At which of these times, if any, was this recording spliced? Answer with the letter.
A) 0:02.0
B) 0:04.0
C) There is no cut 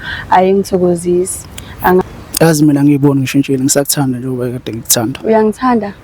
A